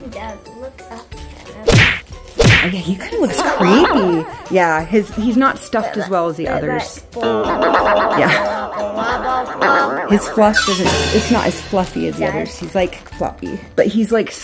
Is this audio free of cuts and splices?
yes; 0 cuts

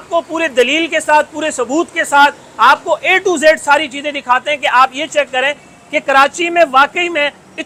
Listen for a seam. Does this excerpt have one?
no; 0 cuts

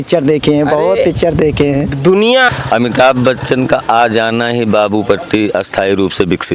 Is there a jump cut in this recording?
yes; 1 cut; at 2.5 s

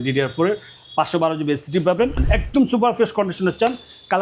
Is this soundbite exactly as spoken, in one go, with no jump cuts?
no; 1 cut; at 2.2 s

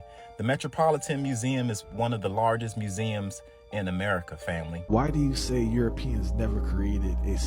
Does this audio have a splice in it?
yes; 1 cut; at 4.8 s

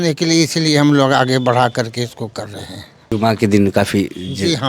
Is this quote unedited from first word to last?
no; 1 cut; at 3.1 s

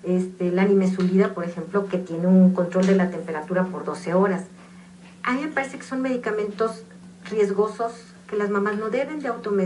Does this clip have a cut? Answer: yes; 1 cut; at 5.8 s

